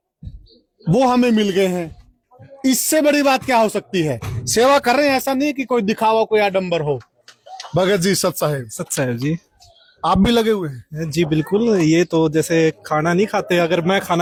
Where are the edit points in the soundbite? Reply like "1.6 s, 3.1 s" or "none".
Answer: none